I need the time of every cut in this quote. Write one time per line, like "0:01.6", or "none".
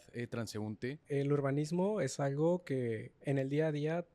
0:01.0